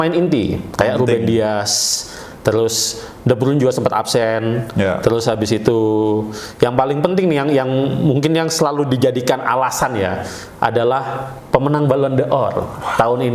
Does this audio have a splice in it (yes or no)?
no